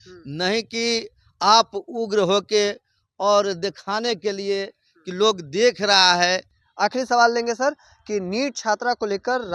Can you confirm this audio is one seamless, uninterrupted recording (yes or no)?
no